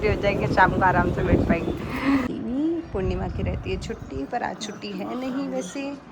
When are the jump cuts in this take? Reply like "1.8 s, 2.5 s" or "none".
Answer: 2.2 s